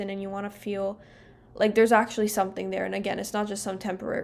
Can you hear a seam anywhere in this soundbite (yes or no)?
no